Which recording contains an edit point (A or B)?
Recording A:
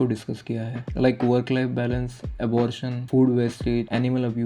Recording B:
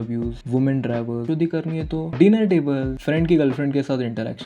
B